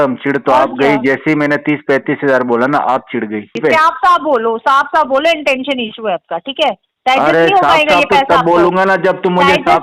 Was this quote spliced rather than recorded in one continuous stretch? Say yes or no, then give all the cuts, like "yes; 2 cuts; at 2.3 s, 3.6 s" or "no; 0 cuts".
yes; 1 cut; at 3.6 s